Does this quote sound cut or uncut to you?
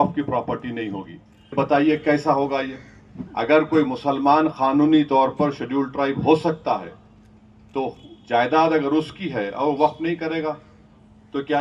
cut